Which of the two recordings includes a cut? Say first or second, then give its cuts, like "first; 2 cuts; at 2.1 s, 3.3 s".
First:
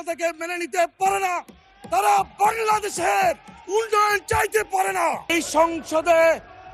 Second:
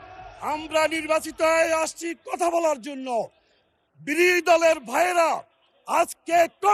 first; 1 cut; at 5.3 s